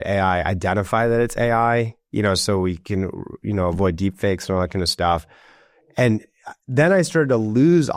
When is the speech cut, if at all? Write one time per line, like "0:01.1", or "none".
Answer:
none